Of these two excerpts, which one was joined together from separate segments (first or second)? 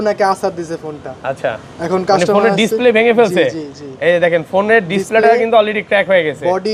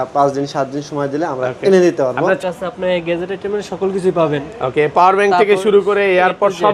second